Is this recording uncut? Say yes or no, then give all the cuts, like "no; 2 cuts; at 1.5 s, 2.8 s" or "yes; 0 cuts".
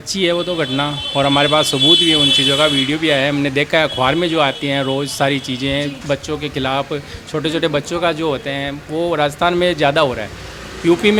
yes; 0 cuts